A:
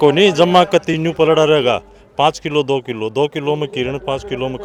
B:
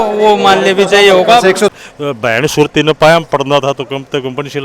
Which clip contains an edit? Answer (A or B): B